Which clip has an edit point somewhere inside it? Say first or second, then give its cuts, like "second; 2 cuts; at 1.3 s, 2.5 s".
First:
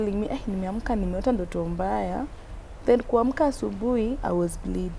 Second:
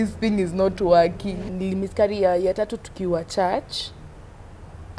second; 1 cut; at 1.5 s